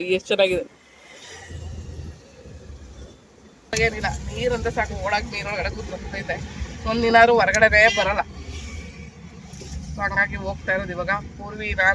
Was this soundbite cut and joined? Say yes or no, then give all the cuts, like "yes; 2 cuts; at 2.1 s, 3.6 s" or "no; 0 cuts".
yes; 1 cut; at 3.7 s